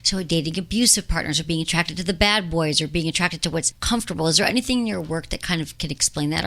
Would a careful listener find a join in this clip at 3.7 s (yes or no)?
yes